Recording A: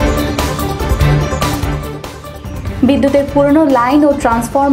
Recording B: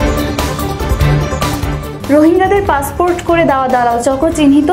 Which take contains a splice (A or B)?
B